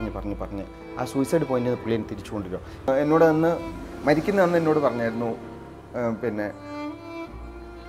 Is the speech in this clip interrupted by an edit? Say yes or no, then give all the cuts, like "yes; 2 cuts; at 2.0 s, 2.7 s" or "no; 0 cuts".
yes; 1 cut; at 2.9 s